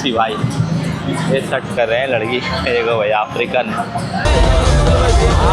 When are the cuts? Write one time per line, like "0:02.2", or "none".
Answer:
0:04.3

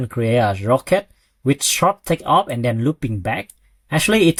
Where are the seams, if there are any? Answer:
none

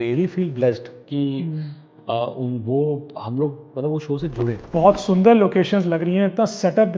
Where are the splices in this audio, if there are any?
0:04.7

